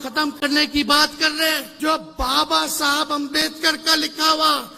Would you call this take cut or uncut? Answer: cut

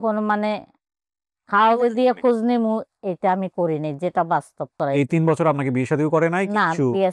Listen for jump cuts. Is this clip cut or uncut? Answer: cut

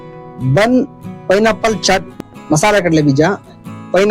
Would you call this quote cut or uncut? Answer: cut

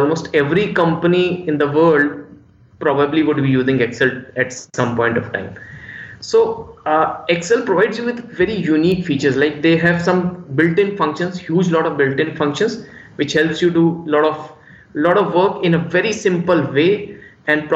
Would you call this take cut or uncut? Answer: uncut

